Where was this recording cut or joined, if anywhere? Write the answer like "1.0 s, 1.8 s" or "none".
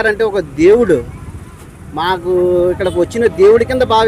none